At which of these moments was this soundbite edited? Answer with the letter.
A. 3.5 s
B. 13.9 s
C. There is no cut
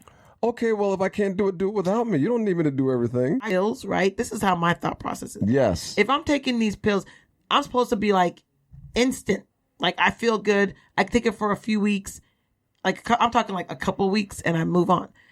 A